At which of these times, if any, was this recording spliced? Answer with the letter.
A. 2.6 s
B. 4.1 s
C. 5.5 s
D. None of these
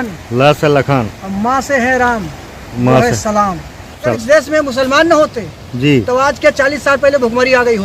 B